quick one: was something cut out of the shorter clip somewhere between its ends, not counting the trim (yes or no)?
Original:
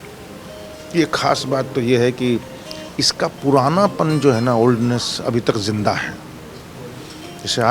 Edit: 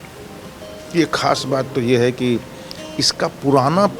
no